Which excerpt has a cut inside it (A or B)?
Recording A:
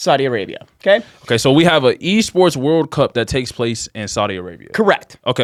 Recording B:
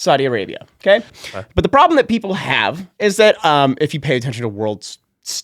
B